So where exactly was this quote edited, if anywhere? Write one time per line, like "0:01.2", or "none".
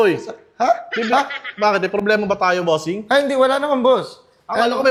none